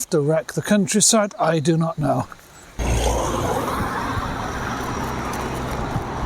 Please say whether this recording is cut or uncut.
cut